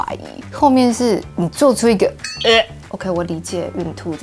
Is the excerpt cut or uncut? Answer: cut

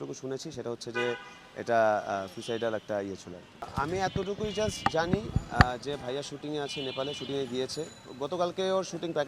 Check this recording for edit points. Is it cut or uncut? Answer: cut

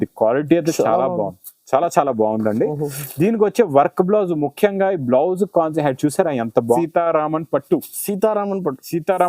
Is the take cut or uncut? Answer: cut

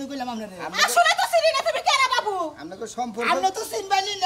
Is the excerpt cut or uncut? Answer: uncut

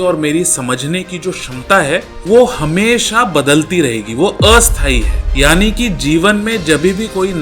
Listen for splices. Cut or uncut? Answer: cut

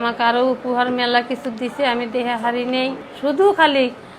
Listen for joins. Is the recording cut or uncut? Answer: cut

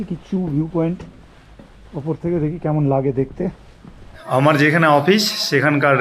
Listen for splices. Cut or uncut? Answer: cut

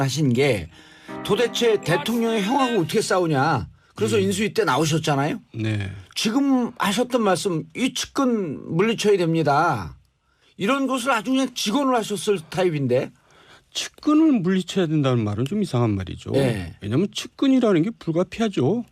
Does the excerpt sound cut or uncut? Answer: uncut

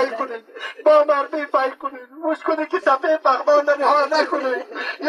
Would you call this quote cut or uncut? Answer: uncut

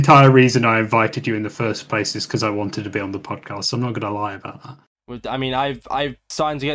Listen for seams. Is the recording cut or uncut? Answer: cut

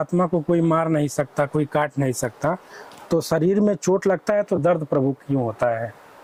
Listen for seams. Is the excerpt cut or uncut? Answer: uncut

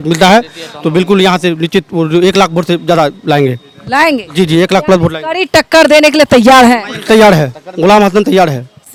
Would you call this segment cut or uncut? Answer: uncut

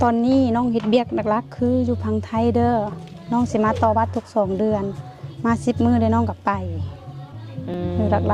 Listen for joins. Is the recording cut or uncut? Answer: uncut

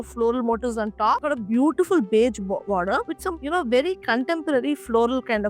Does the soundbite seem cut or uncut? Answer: cut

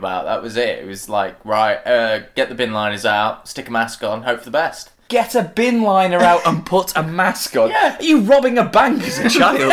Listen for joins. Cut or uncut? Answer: cut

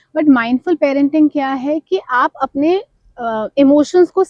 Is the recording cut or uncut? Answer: uncut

